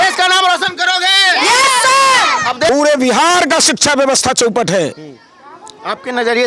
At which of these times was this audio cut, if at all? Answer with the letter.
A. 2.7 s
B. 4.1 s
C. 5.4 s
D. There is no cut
A